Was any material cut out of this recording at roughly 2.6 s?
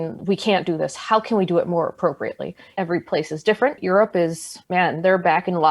yes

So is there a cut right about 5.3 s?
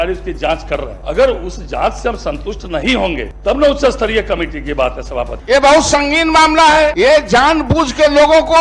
yes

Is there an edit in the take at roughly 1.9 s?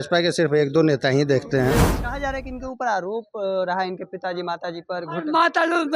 yes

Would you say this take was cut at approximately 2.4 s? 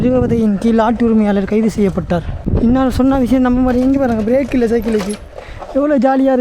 yes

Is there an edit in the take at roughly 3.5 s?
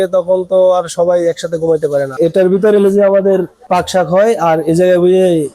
yes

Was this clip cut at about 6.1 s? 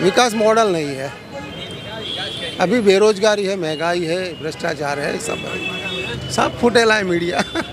yes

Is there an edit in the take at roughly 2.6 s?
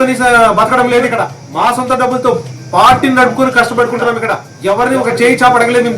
no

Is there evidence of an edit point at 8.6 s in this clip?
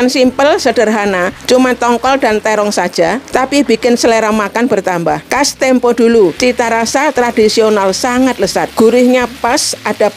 yes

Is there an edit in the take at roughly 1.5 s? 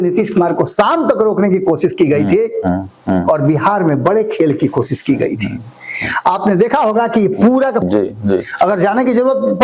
no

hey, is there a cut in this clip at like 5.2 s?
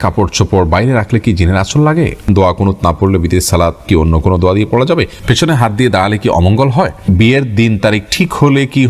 yes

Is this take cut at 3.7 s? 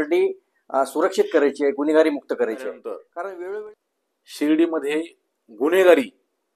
yes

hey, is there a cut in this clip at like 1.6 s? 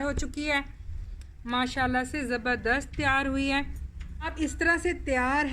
no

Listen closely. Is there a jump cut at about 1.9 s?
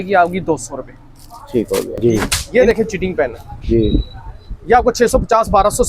yes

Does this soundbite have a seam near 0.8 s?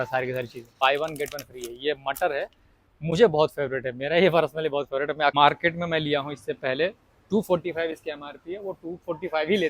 yes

